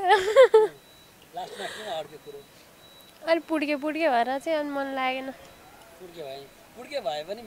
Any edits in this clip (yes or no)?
no